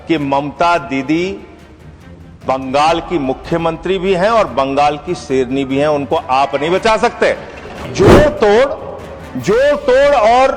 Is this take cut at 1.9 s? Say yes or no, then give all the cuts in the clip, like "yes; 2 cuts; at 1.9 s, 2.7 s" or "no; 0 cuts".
no; 1 cut; at 7.8 s